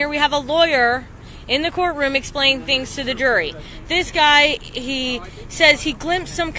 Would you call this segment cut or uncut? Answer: cut